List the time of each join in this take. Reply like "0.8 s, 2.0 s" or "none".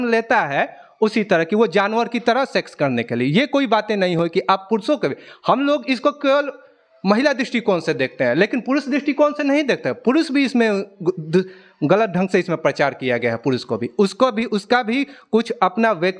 none